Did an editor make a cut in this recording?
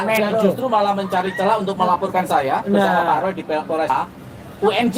yes; 1 cut; at 3.9 s

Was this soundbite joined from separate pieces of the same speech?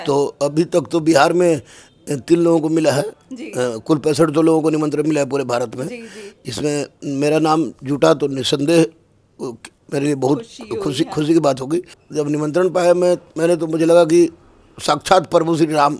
no; 0 cuts

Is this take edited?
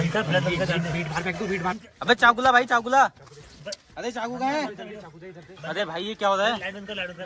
yes; 1 cut; at 1.8 s

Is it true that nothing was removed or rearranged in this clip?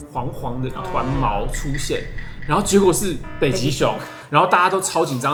yes; 0 cuts

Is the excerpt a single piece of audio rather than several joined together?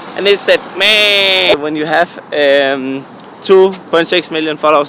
no; 1 cut; at 1.5 s

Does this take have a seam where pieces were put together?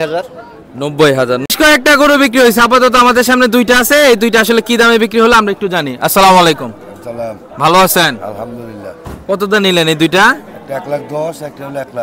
yes; 1 cut; at 1.4 s

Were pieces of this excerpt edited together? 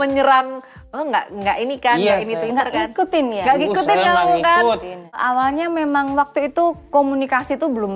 yes; 1 cut; at 5.2 s

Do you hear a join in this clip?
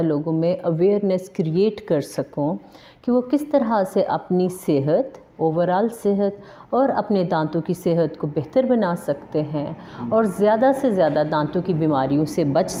no; 0 cuts

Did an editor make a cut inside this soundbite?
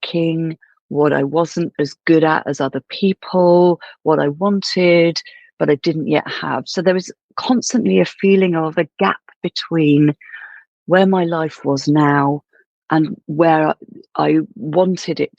no; 0 cuts

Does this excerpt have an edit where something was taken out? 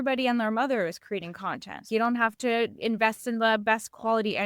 yes; 1 cut; at 1.9 s

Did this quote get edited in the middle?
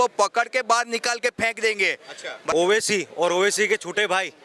yes; 1 cut; at 2.5 s

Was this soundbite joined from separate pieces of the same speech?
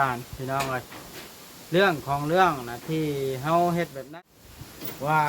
yes; 1 cut; at 4.0 s

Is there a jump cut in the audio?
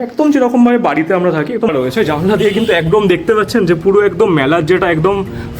yes; 1 cut; at 1.7 s

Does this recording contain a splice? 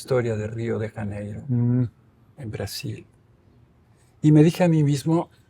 no; 0 cuts

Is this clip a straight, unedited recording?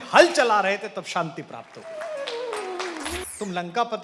no; 1 cut; at 3.2 s

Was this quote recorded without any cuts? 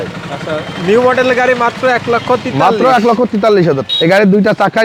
no; 1 cut; at 3.9 s

